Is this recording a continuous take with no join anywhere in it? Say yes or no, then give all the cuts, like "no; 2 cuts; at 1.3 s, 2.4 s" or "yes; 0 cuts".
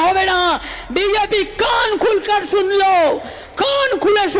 yes; 0 cuts